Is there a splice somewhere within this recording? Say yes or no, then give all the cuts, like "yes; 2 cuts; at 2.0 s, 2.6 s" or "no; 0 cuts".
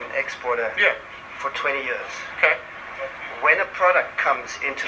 no; 0 cuts